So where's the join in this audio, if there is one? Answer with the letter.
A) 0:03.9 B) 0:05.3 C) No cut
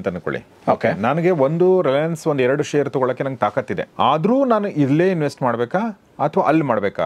A